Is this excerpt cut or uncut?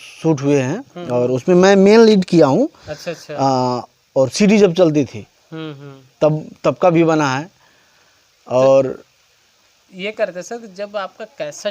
uncut